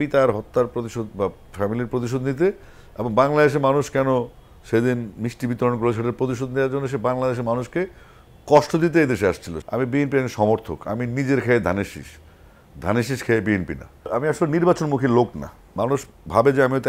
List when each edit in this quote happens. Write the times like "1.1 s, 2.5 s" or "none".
9.5 s, 14.1 s